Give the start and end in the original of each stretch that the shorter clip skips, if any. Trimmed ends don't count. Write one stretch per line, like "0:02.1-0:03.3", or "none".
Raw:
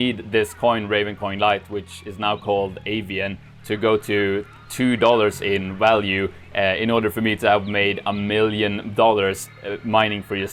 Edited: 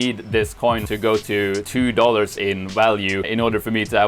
0:00.8-0:03.6
0:04.5-0:04.7
0:06.3-0:06.8